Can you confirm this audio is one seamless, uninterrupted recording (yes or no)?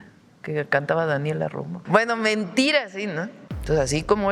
no